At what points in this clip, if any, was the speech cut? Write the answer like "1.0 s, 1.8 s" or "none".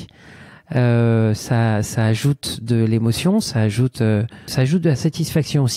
4.5 s